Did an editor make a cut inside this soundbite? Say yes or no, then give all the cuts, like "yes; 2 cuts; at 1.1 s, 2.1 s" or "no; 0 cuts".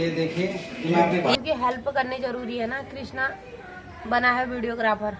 yes; 1 cut; at 1.3 s